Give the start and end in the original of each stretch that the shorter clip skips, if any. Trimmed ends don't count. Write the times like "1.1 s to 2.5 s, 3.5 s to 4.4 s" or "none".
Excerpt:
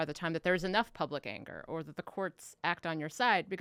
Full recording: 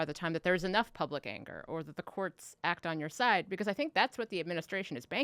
none